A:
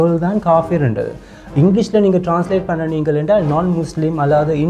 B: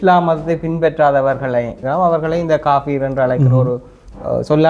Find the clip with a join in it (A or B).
B